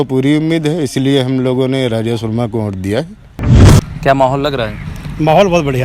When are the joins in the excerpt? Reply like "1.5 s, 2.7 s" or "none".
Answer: 3.5 s